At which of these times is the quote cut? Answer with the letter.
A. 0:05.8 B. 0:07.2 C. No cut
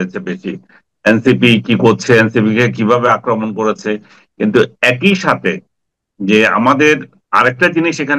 B